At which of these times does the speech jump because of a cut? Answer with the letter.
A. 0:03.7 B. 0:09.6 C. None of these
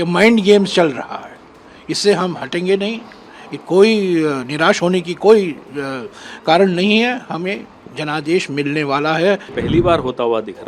B